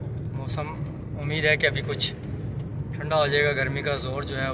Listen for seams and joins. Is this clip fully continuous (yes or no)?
yes